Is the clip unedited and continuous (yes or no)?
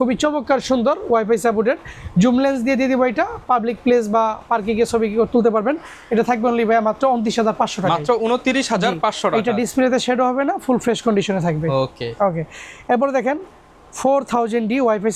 yes